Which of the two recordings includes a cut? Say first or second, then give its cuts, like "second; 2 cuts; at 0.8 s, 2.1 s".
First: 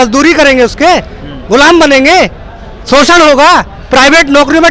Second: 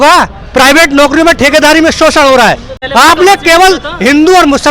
second; 1 cut; at 2.7 s